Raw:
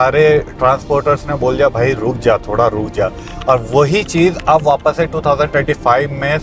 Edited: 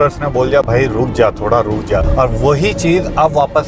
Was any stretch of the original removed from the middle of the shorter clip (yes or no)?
yes